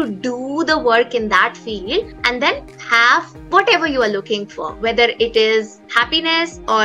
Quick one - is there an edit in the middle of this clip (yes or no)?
yes